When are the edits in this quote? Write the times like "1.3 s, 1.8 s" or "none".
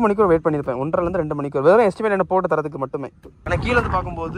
3.3 s